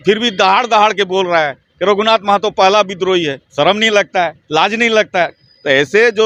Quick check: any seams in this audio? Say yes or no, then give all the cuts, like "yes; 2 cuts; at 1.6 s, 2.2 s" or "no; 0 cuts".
no; 0 cuts